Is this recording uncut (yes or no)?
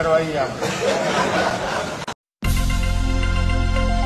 no